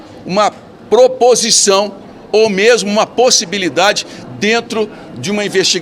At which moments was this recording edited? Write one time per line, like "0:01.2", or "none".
none